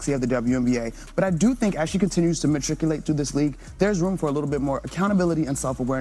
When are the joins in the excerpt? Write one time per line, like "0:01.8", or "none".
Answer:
none